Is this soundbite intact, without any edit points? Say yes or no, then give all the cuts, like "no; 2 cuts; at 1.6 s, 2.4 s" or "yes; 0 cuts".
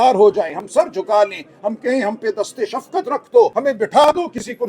no; 1 cut; at 3.5 s